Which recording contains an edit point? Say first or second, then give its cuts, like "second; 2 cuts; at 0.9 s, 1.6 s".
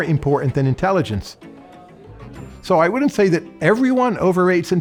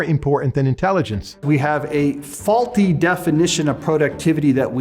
second; 1 cut; at 1.3 s